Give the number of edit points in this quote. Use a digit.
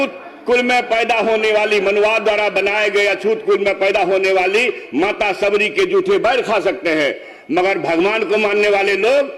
0